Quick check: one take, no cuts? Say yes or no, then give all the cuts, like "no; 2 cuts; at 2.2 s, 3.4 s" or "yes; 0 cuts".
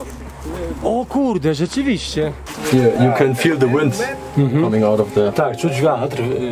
no; 1 cut; at 2.4 s